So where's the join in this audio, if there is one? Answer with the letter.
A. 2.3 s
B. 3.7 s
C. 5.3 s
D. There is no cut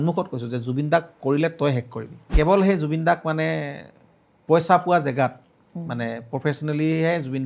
A